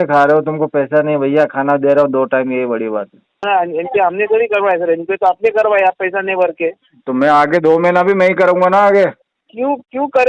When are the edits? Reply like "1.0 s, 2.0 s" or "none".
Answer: 3.4 s

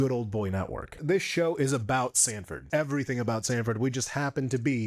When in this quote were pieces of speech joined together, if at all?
1.0 s, 2.6 s

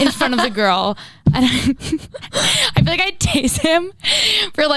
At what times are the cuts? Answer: none

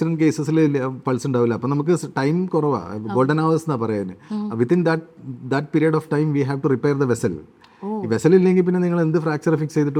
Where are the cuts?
none

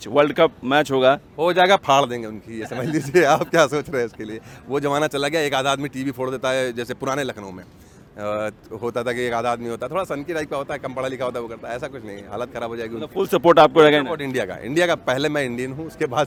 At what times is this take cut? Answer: none

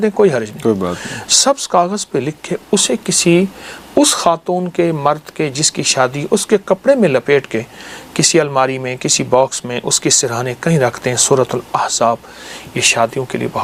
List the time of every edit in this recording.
none

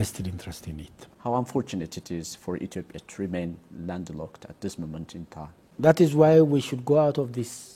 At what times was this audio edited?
1.1 s, 5.7 s

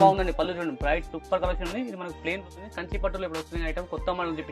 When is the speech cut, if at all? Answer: 2.4 s

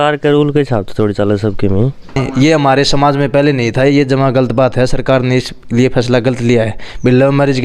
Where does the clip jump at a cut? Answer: 2.2 s

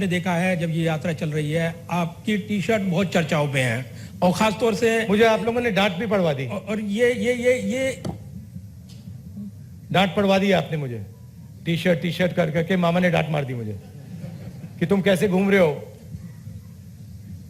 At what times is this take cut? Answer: none

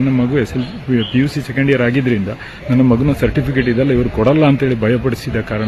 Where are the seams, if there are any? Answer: none

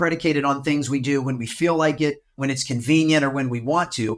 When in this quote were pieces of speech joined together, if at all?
2.4 s

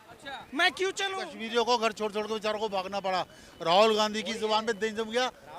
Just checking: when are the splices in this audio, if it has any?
1.2 s

